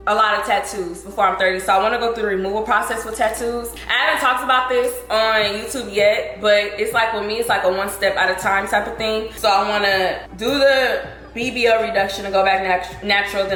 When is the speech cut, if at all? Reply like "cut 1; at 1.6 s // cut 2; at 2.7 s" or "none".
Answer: none